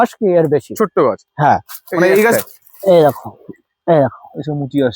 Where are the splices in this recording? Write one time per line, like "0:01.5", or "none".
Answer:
0:02.3